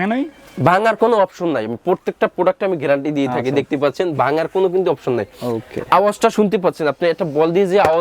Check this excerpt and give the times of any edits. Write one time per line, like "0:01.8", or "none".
none